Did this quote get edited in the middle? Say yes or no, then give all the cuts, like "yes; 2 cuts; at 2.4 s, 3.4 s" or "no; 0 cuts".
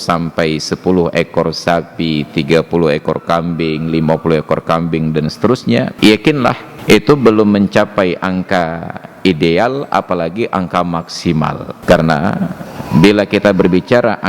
yes; 3 cuts; at 5.9 s, 6.7 s, 11.7 s